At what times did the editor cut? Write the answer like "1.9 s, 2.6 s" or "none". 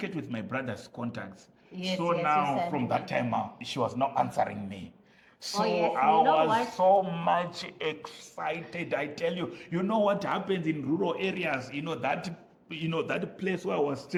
none

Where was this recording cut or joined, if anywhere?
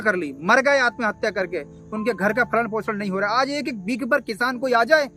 none

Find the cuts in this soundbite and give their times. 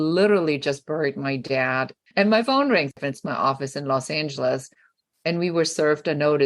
2.0 s, 2.9 s

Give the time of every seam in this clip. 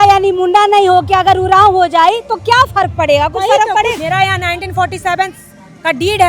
4.0 s

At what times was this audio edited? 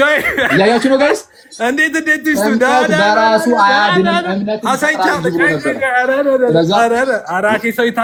none

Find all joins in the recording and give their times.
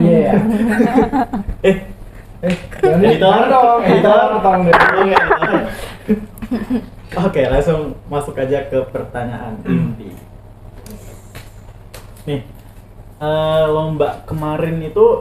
none

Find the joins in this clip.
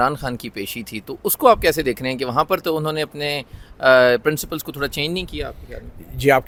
none

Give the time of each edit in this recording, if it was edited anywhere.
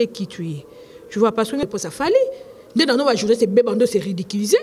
1.7 s

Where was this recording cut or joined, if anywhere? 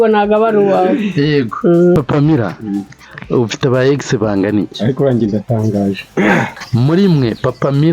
2.0 s, 6.6 s

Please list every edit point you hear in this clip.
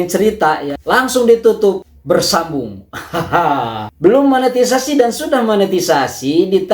3.9 s

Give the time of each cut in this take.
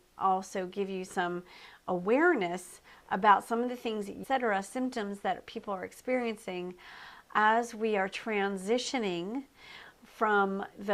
none

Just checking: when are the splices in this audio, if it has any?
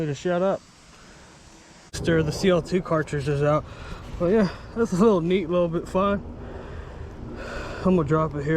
2.0 s

